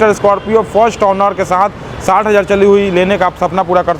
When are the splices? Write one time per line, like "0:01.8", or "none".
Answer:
none